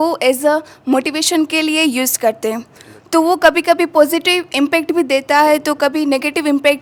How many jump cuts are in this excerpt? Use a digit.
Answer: 0